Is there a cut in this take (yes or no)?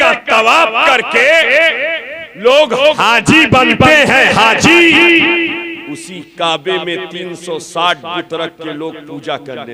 no